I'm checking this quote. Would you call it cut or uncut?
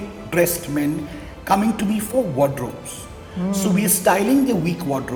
uncut